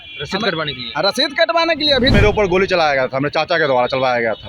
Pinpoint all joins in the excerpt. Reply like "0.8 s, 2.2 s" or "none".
2.1 s